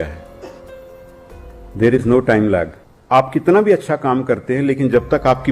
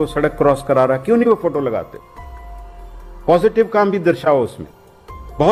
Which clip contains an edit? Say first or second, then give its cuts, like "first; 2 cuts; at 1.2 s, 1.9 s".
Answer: first; 1 cut; at 2.9 s